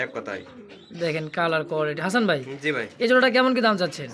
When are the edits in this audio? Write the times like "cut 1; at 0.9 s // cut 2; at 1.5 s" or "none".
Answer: none